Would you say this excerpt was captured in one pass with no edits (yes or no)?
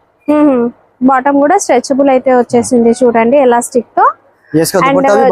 yes